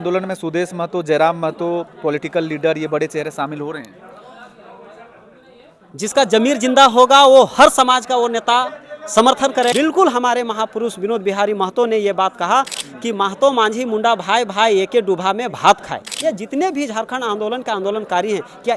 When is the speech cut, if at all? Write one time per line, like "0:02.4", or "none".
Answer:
0:09.7
0:12.8
0:16.1